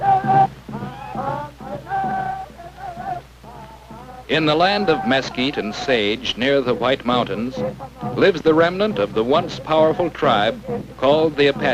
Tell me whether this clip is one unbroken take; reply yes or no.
yes